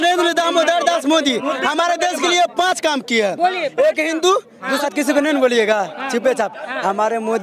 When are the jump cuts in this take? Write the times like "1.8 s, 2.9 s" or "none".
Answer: 4.8 s